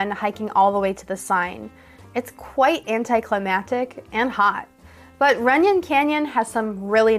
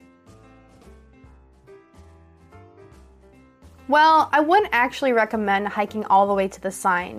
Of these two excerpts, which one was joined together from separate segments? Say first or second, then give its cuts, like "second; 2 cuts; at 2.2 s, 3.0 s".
second; 1 cut; at 3.9 s